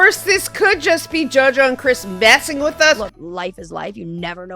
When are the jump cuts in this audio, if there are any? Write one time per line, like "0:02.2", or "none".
0:03.1